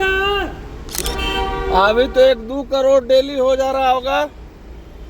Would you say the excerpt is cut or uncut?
cut